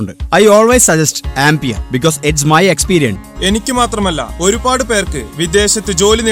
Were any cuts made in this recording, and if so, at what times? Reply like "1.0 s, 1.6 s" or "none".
3.2 s